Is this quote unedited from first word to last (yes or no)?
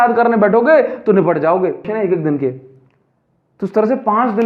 no